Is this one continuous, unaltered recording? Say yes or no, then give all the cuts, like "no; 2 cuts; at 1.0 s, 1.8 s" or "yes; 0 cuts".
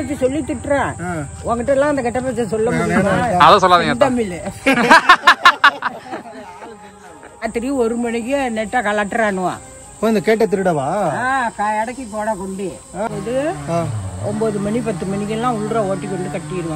no; 2 cuts; at 7.4 s, 13.1 s